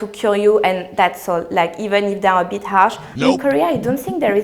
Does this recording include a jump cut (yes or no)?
yes